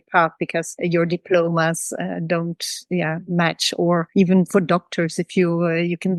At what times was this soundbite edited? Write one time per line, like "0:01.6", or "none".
none